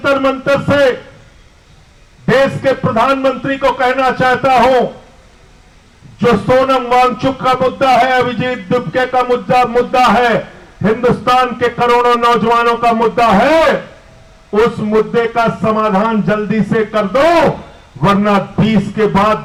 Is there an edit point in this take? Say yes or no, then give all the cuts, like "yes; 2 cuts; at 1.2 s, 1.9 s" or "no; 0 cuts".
no; 0 cuts